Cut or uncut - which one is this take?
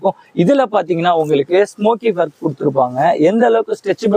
uncut